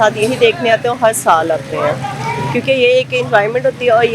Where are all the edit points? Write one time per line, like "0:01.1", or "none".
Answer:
none